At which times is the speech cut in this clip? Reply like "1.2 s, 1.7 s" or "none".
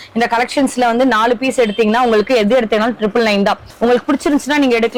none

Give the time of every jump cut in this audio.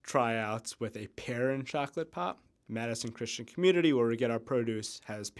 2.5 s

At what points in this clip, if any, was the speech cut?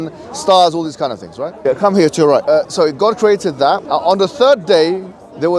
1.5 s, 2.6 s, 3.8 s

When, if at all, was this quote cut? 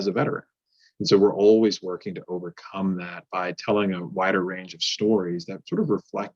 none

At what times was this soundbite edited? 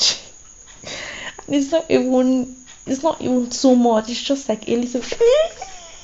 4.9 s

